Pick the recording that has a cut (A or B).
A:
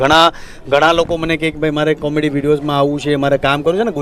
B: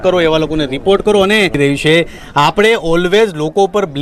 B